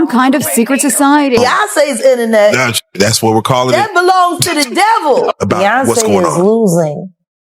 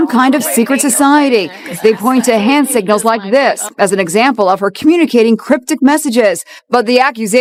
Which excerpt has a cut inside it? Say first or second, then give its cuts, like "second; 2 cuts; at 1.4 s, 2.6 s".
first; 2 cuts; at 1.5 s, 5.3 s